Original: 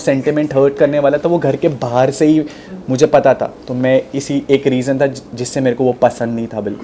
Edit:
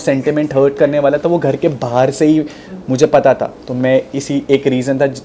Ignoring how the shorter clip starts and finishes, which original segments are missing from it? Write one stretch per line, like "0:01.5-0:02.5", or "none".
none

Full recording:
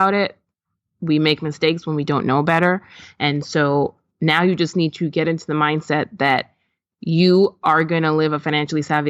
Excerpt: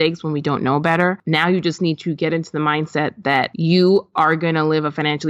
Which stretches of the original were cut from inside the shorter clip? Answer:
0:02.8-0:04.2
0:06.5-0:07.0

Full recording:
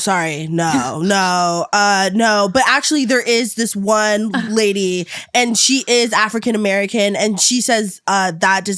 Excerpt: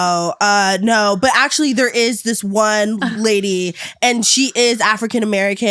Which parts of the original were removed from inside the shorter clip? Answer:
none

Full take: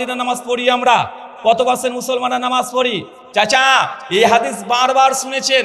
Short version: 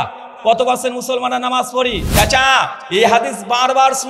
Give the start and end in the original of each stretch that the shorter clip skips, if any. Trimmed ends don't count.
0:03.0-0:03.2

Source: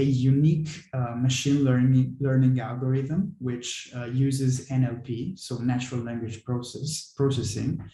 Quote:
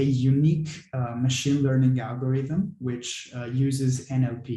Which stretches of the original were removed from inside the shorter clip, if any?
0:01.6-0:02.2

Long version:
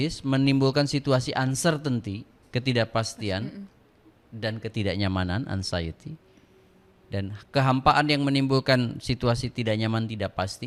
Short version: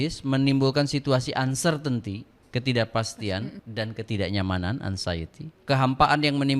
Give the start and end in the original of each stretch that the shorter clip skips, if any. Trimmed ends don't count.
0:03.6-0:04.3
0:06.2-0:07.4

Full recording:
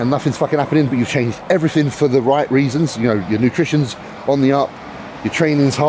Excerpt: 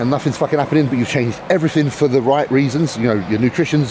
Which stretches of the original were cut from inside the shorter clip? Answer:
none

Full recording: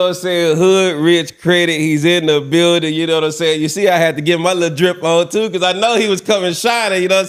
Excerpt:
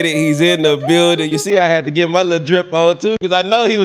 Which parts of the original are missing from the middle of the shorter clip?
0:02.9-0:03.6

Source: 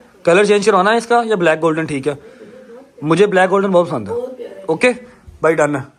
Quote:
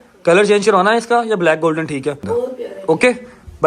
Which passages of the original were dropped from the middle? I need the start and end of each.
0:02.2-0:04.0

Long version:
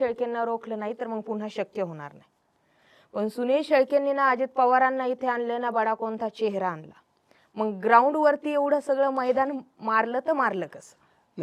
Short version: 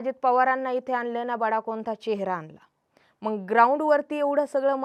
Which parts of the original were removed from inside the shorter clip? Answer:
none

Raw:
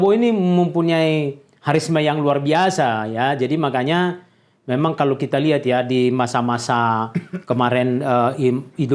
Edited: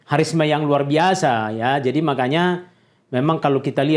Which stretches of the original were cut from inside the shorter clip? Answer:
none

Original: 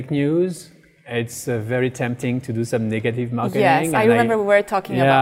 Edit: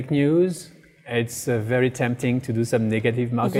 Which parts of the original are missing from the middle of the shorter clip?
none

